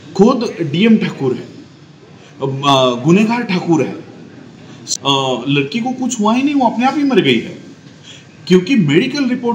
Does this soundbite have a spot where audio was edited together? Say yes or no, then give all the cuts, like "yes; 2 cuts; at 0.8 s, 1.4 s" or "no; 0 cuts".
yes; 1 cut; at 4.8 s